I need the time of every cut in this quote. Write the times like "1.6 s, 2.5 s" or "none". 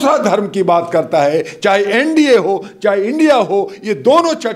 none